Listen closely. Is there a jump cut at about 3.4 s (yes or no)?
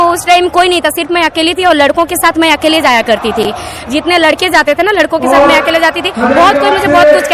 no